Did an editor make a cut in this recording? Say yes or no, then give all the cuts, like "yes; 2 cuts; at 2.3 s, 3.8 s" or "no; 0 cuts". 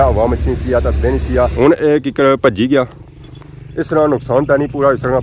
yes; 1 cut; at 1.5 s